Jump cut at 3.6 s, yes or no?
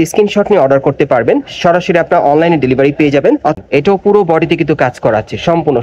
yes